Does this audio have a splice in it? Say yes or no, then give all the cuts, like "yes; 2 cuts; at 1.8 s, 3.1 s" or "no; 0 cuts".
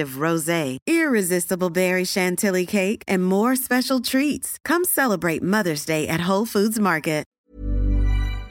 yes; 1 cut; at 7.3 s